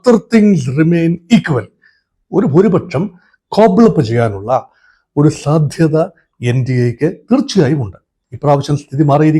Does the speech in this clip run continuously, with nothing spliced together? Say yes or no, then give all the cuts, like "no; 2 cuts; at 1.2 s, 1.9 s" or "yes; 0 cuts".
no; 1 cut; at 8.1 s